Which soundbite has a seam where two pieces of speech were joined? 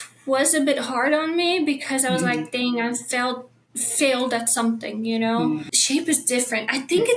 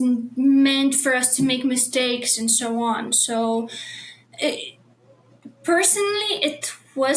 first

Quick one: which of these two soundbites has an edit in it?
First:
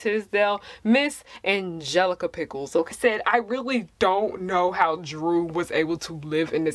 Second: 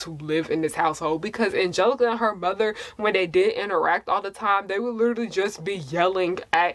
first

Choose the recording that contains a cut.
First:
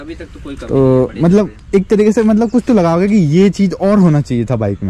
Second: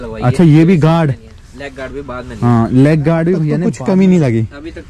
second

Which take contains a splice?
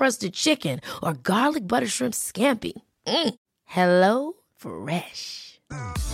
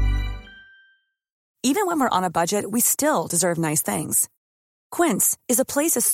second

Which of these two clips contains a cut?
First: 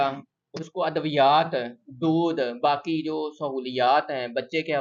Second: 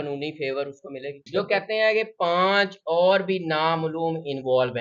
second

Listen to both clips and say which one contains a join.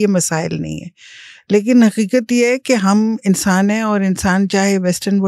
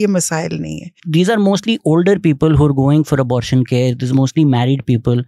second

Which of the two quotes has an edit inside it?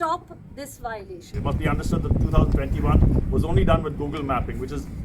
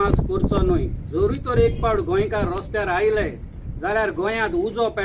first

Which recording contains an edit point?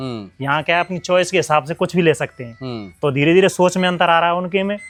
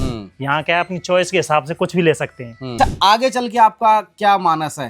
second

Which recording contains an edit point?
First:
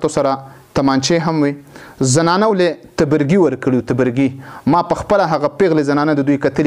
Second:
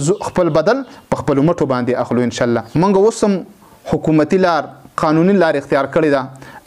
second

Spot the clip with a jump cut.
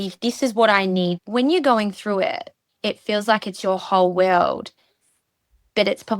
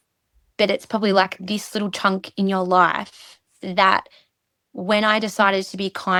first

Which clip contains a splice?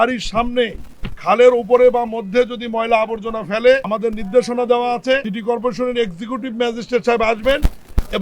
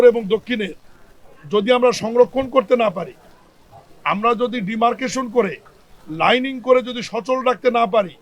first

